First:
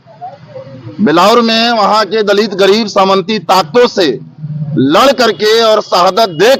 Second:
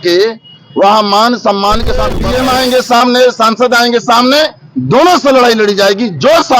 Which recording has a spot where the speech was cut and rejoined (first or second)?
second